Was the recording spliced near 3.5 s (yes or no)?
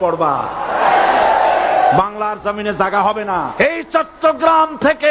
yes